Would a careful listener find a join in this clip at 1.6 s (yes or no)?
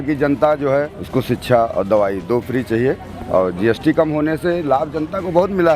no